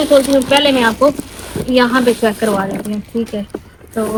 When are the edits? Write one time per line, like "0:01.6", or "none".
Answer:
none